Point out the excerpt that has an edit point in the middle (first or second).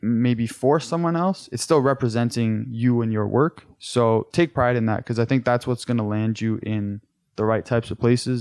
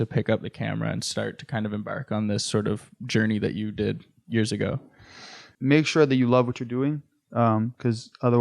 second